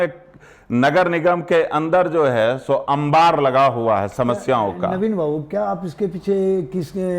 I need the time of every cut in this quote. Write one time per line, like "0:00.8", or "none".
none